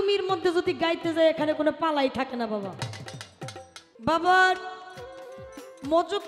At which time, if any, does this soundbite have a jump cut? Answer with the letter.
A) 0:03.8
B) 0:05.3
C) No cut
A